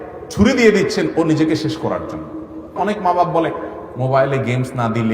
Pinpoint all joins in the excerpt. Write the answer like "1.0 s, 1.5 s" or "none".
2.7 s